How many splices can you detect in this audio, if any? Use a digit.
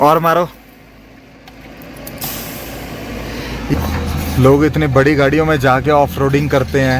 1